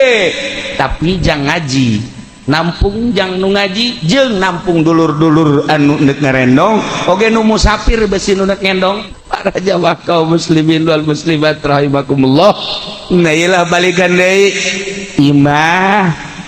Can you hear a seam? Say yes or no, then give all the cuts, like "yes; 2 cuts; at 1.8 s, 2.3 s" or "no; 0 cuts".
yes; 1 cut; at 9.0 s